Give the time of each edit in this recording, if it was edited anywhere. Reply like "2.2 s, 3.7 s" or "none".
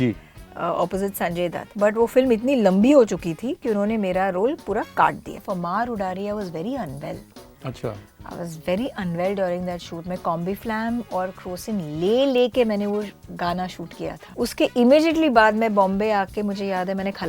5.4 s, 14.3 s